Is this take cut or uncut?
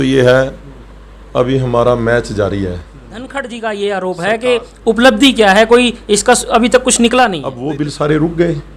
cut